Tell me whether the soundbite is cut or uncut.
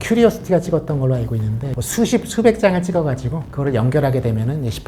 cut